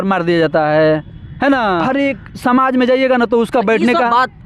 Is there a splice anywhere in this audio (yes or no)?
no